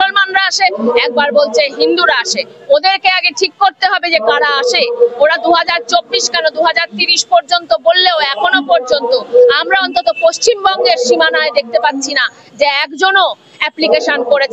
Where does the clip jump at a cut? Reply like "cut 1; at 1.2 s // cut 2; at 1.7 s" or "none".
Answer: none